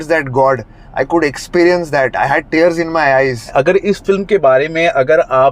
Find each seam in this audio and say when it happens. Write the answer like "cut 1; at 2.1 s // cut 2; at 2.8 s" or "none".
cut 1; at 3.5 s